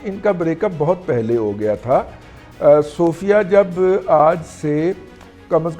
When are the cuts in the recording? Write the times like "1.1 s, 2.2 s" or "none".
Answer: none